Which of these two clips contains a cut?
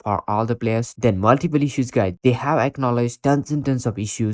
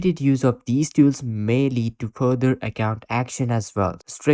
first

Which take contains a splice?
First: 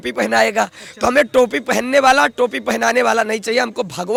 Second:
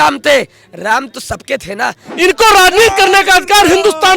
second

